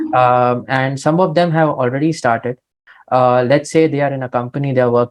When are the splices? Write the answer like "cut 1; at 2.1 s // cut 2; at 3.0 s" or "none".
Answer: cut 1; at 2.9 s